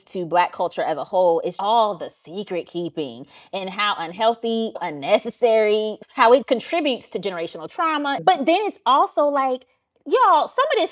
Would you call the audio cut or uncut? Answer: uncut